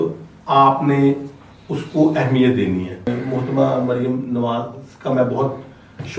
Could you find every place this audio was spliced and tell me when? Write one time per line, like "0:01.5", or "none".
0:03.1